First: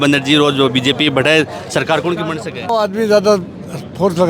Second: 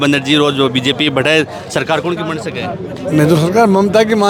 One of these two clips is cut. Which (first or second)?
first